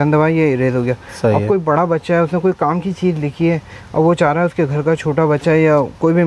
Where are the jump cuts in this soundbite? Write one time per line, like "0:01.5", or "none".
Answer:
none